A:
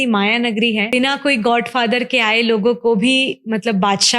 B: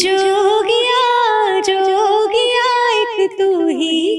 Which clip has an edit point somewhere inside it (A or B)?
A